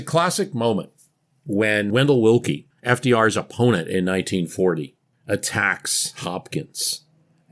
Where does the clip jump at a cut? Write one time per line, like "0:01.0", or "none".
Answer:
0:01.9
0:02.7
0:05.1